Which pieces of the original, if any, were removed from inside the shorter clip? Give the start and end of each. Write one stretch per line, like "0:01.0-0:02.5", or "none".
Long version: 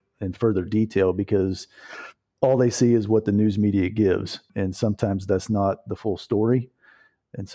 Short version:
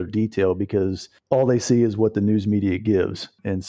0:01.7-0:02.2